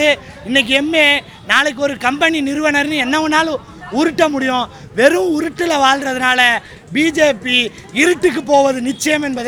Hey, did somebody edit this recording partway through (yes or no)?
no